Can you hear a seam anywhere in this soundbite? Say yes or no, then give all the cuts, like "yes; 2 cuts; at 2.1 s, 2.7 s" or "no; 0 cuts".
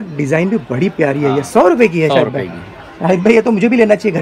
no; 0 cuts